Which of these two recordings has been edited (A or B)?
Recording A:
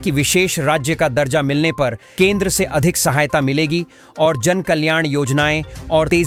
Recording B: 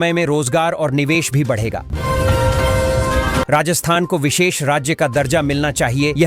B